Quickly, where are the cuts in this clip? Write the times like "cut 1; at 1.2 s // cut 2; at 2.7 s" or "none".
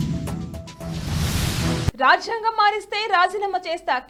none